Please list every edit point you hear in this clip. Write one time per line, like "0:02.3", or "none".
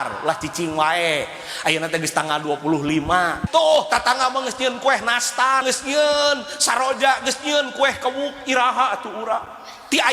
0:03.4
0:05.6